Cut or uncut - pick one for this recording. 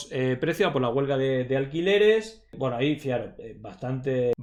uncut